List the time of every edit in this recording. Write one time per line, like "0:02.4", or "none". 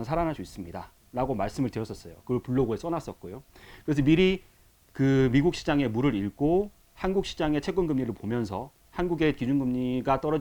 none